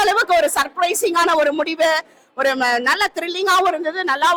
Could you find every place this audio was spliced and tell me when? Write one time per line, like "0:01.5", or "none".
none